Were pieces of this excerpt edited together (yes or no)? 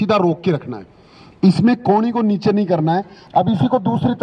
yes